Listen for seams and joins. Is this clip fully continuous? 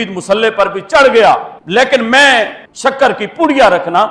yes; 0 cuts

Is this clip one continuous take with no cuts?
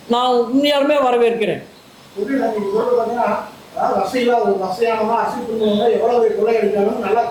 yes; 0 cuts

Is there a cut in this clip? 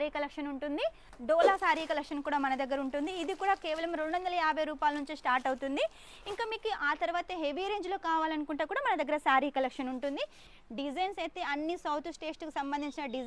yes; 2 cuts; at 1.1 s, 10.6 s

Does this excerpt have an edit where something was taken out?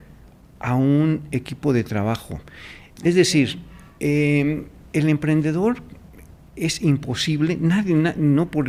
no; 0 cuts

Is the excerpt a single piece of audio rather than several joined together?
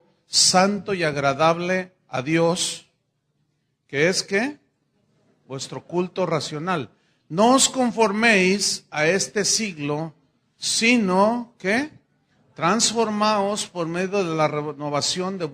no; 1 cut; at 7.5 s

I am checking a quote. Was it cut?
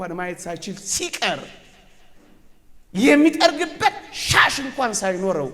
no; 0 cuts

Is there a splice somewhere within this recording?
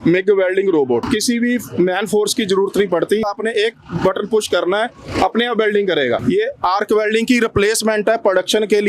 yes; 3 cuts; at 1.0 s, 3.3 s, 6.2 s

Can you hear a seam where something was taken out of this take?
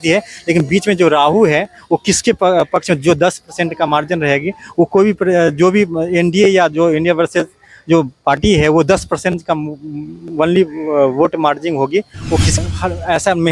yes; 1 cut; at 12.6 s

